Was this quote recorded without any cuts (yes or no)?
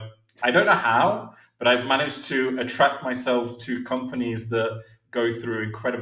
yes